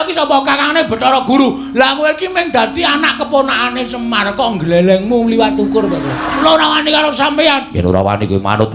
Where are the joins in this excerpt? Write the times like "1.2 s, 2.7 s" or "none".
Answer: 6.4 s